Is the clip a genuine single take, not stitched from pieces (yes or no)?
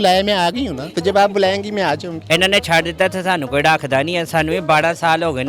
no